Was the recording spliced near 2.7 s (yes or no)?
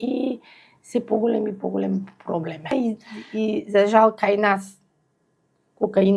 yes